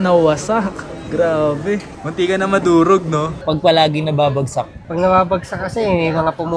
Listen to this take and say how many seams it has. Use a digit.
1